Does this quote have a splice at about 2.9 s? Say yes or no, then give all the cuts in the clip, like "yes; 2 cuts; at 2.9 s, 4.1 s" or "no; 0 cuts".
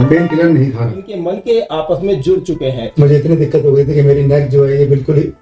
yes; 2 cuts; at 1.1 s, 2.9 s